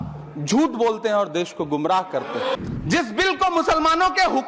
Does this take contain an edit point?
yes; 1 cut; at 2.5 s

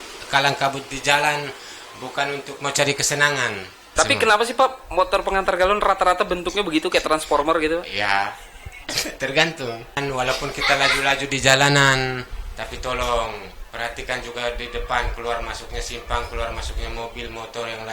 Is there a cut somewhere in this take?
yes; 2 cuts; at 3.7 s, 10.0 s

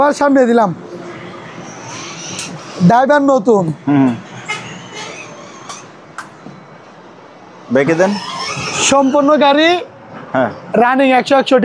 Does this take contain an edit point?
no; 0 cuts

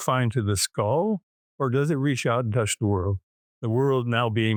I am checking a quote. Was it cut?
no; 0 cuts

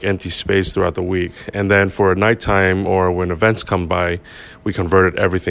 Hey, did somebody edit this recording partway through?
no; 0 cuts

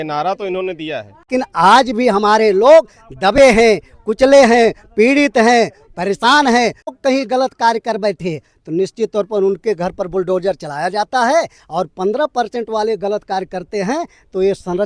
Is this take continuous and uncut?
no; 2 cuts; at 1.2 s, 7.0 s

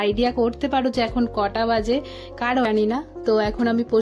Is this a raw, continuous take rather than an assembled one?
no; 1 cut; at 2.7 s

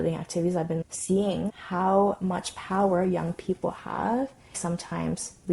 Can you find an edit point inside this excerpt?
yes; 3 cuts; at 0.9 s, 1.5 s, 4.6 s

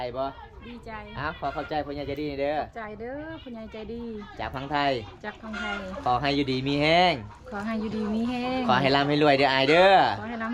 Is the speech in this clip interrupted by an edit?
no; 0 cuts

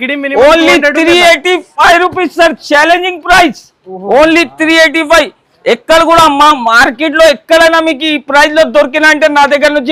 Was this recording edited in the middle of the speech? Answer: no; 0 cuts

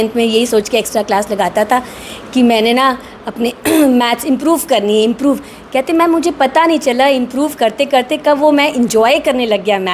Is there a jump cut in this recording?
no; 0 cuts

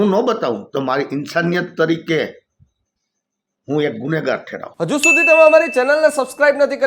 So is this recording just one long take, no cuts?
no; 1 cut; at 4.6 s

